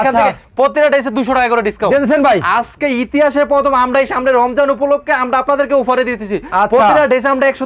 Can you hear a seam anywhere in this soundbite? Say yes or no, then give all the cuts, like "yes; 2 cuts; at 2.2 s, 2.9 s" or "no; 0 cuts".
no; 0 cuts